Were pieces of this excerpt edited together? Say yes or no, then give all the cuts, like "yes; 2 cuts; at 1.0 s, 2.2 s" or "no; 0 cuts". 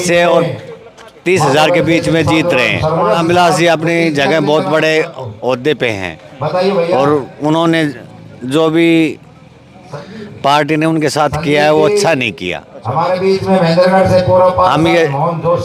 no; 0 cuts